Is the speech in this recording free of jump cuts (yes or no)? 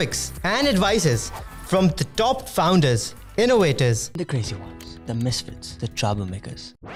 yes